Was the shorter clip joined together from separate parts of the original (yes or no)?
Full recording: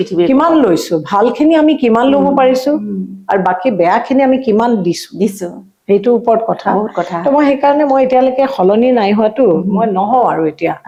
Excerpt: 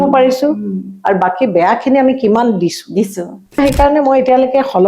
yes